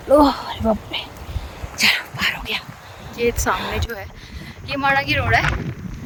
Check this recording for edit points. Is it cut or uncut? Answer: uncut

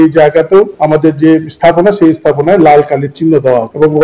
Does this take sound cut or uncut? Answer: uncut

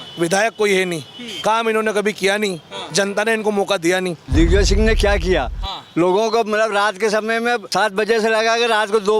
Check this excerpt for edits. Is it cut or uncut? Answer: cut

